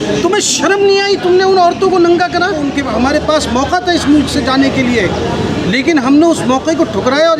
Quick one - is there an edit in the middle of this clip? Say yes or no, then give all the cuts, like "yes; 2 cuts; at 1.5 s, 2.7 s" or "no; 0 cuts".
yes; 1 cut; at 2.6 s